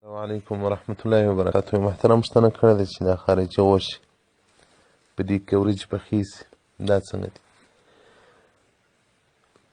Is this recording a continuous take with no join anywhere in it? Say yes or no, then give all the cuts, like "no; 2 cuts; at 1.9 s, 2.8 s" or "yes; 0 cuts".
no; 1 cut; at 1.5 s